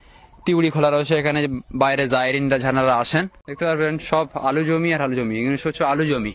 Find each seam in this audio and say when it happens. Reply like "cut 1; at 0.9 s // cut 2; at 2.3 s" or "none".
cut 1; at 3.4 s